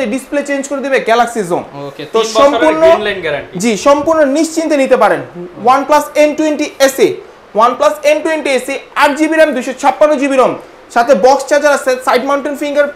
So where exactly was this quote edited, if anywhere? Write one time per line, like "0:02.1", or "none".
none